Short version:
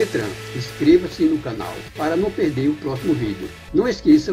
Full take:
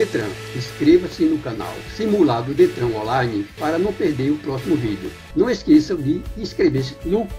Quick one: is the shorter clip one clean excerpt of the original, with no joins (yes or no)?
no